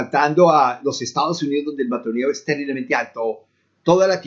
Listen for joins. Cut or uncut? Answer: uncut